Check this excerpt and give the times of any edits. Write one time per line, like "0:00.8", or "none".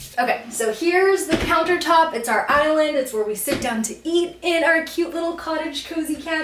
none